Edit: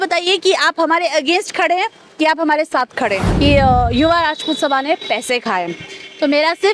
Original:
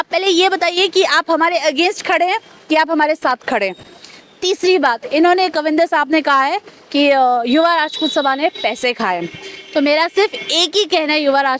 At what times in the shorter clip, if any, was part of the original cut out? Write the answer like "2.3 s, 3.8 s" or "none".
3.3 s

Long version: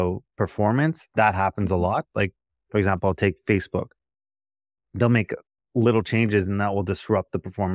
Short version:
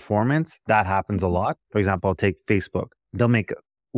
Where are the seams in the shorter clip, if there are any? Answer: 1.6 s, 3.0 s

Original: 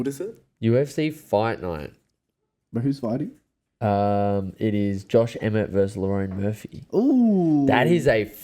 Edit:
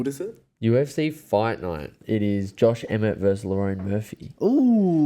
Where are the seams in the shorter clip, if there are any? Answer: 2.0 s

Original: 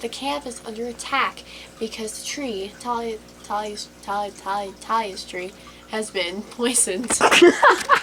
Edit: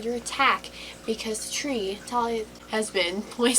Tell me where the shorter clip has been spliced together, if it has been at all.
2.6 s

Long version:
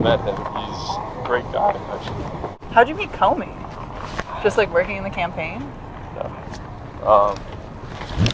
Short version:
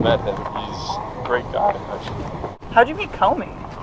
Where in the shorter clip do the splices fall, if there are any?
none

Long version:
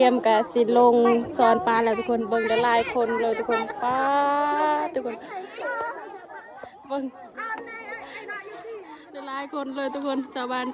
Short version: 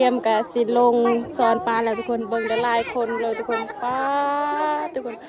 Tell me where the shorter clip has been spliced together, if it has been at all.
none

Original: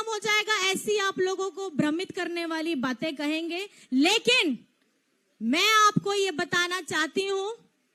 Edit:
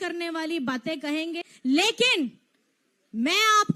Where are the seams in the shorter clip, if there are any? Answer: 1.5 s

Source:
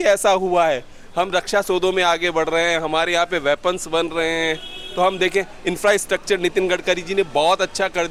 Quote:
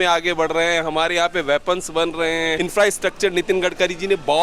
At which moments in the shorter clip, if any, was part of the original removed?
2.6 s

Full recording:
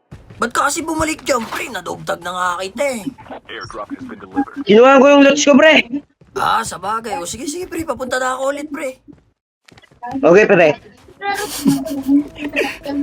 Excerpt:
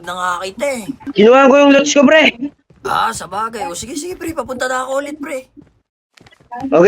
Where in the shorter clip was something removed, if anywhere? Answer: 1.0 s

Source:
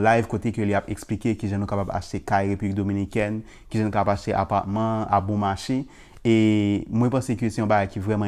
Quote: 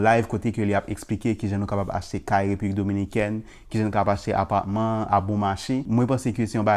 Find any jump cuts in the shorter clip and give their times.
5.9 s

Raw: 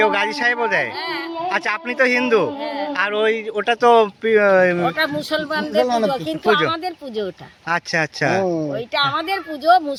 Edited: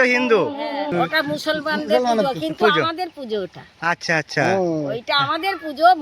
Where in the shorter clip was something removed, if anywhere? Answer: 0.9 s

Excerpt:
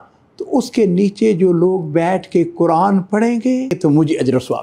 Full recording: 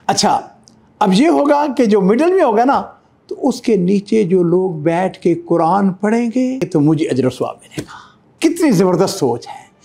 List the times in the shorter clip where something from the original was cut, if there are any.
none

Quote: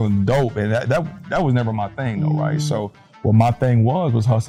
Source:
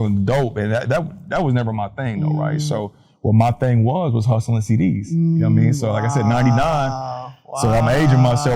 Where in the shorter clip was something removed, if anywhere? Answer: none

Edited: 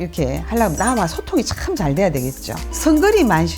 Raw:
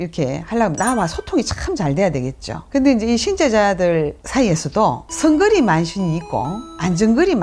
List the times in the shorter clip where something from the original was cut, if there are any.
2.6 s

